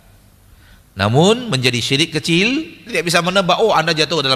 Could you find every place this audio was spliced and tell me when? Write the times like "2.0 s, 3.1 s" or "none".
2.9 s